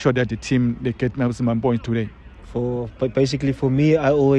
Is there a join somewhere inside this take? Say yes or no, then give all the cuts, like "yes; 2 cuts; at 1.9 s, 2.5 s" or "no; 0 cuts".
no; 0 cuts